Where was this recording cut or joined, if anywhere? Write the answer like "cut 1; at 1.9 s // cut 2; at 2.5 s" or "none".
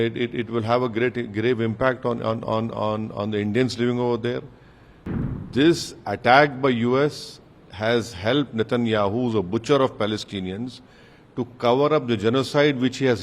cut 1; at 5.3 s

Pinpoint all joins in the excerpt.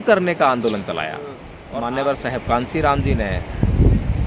cut 1; at 1.5 s

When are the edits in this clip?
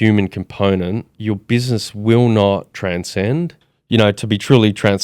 cut 1; at 1.1 s // cut 2; at 2.7 s // cut 3; at 3.7 s

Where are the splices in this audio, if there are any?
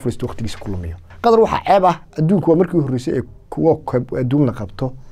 cut 1; at 1.0 s

